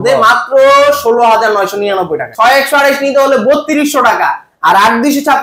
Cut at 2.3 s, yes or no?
yes